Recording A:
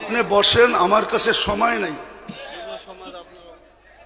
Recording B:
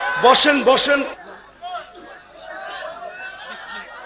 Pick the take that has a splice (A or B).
B